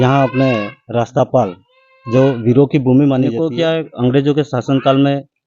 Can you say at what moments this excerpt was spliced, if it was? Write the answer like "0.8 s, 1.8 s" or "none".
3.4 s